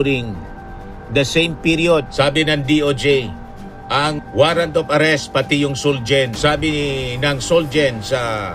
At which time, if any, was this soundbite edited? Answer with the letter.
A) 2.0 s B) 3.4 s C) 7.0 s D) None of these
A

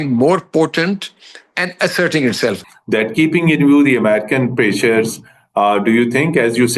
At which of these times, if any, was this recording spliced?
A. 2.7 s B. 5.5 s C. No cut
A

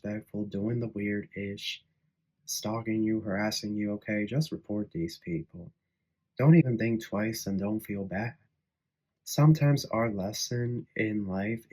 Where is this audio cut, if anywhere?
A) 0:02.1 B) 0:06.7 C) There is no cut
C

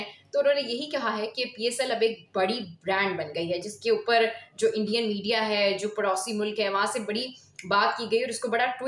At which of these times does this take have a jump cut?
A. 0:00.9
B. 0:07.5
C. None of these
C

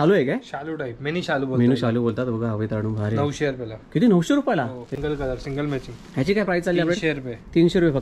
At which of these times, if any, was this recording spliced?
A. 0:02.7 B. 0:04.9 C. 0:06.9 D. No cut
B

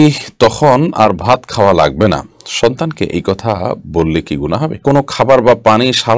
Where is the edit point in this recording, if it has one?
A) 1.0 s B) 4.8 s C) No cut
B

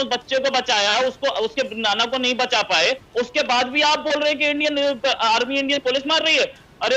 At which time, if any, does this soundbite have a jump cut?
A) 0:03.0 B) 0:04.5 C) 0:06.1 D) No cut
A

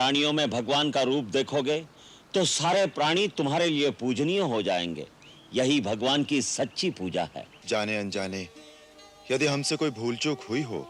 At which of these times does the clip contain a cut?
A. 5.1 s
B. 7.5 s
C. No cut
B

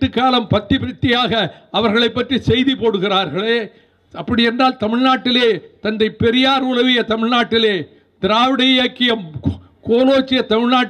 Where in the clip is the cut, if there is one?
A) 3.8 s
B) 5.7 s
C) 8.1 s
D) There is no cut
D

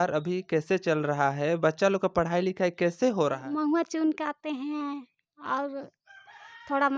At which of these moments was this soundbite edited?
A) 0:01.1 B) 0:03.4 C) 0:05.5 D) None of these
B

